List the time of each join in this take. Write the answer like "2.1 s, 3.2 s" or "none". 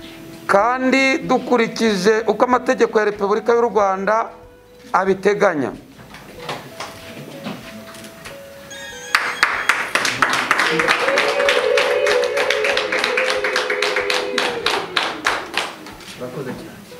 none